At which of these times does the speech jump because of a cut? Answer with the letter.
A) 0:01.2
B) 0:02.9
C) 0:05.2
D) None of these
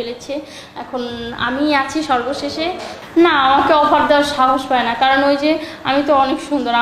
B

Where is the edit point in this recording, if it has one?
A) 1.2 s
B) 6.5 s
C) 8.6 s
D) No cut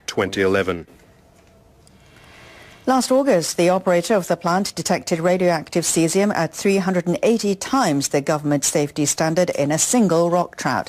C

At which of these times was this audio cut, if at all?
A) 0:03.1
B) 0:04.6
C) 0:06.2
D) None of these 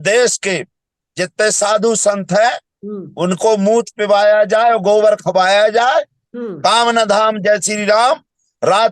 C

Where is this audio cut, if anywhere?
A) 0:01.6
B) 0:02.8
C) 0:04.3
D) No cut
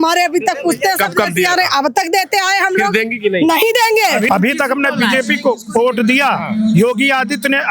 C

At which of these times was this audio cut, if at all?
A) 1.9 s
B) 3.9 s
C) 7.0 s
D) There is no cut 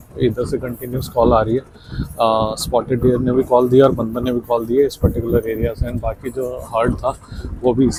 D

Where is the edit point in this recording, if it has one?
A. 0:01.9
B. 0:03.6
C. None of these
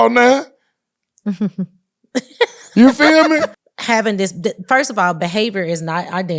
B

